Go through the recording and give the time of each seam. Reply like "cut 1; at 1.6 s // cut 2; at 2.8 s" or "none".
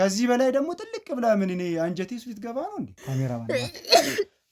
cut 1; at 3.0 s

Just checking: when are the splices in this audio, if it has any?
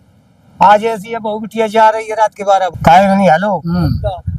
cut 1; at 2.8 s

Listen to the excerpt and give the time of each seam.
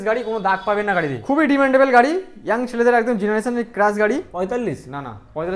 cut 1; at 1.2 s // cut 2; at 4.3 s

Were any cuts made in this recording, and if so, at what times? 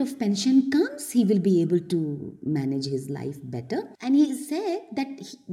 cut 1; at 3.9 s

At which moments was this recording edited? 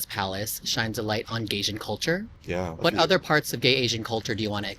cut 1; at 2.7 s

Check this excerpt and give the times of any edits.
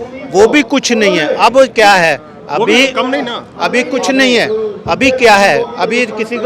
none

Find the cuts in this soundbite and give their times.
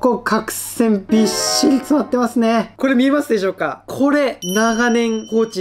cut 1; at 2.7 s

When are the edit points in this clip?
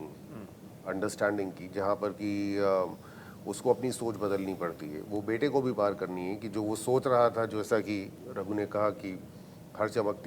none

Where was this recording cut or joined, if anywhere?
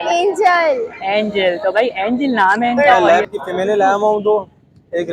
cut 1; at 2.8 s

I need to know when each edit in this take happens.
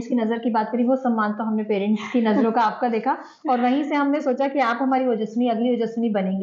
none

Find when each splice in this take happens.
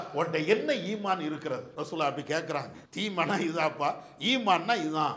cut 1; at 1.7 s // cut 2; at 2.8 s

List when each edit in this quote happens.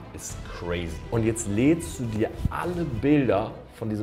cut 1; at 1.0 s

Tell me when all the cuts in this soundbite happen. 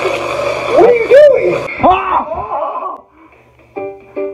cut 1; at 1.7 s

